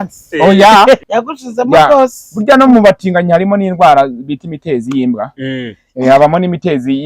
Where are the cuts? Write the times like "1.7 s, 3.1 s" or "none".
1.0 s